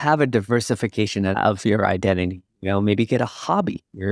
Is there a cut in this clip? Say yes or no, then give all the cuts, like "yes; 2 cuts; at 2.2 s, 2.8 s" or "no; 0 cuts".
yes; 1 cut; at 1.3 s